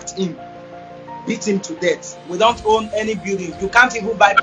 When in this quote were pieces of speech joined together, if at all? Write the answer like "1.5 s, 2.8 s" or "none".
2.1 s